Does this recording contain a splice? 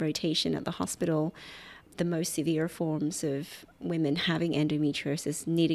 yes; 1 cut; at 1.9 s

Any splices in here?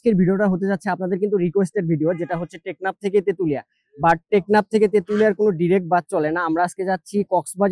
no; 0 cuts

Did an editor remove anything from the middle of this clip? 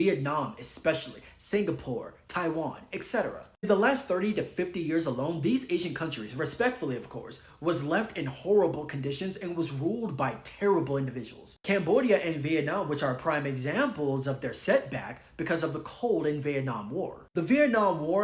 no; 0 cuts

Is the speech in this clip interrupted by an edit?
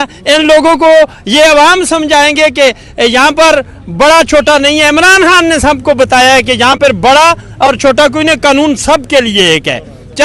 no; 0 cuts

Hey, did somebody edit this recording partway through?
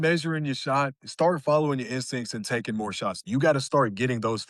yes; 2 cuts; at 1.0 s, 3.3 s

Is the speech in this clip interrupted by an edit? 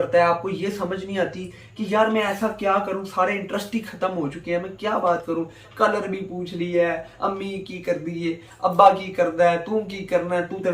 no; 0 cuts

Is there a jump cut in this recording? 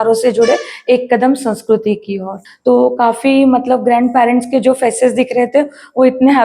yes; 1 cut; at 2.4 s

